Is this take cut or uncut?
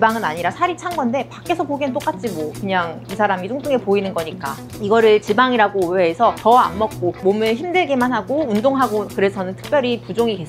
uncut